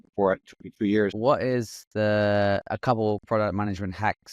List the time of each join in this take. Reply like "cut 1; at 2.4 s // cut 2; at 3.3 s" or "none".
cut 1; at 1.1 s